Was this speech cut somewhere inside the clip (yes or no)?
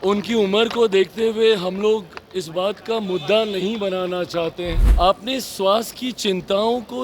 yes